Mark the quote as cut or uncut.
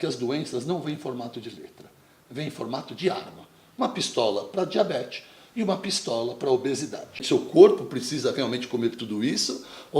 cut